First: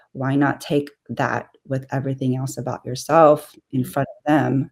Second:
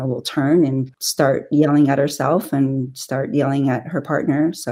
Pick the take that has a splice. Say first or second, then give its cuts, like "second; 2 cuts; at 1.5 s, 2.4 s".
second; 1 cut; at 1.0 s